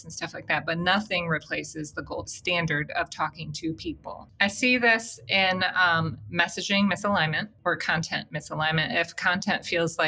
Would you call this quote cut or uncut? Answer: cut